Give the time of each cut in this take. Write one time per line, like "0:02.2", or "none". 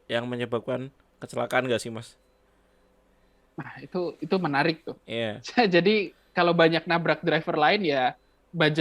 none